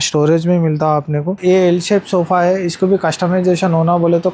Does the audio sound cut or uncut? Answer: cut